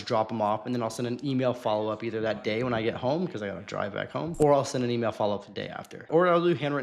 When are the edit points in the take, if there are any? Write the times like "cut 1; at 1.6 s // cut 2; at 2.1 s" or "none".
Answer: cut 1; at 4.3 s // cut 2; at 6.1 s